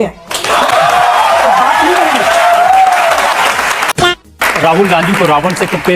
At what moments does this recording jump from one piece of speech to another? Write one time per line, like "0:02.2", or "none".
0:04.0